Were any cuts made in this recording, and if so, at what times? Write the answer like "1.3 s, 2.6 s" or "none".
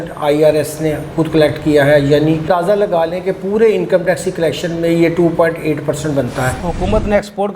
2.5 s, 6.6 s